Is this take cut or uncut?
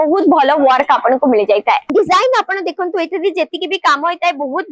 cut